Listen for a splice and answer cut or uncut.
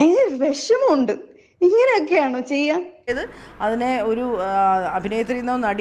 cut